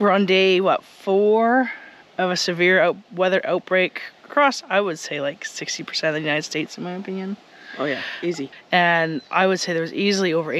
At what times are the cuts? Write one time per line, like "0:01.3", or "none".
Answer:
0:08.5

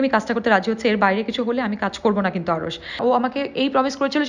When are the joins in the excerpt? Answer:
0:03.0

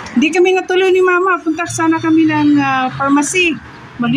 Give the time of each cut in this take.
none

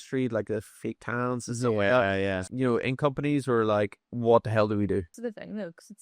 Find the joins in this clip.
0:02.4
0:04.0
0:05.1

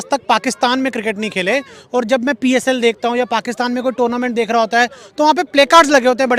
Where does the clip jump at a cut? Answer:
none

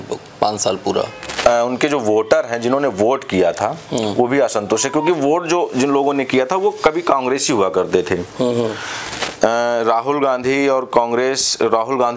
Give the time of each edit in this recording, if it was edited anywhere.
0:01.3

